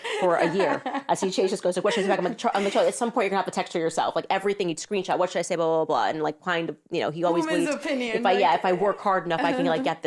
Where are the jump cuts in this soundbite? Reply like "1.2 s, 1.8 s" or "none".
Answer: none